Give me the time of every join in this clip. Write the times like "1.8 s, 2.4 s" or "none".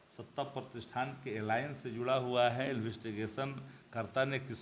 none